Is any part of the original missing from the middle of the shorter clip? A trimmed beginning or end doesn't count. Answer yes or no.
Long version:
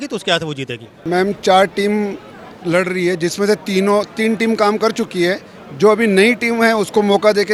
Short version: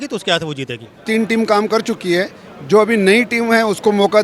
yes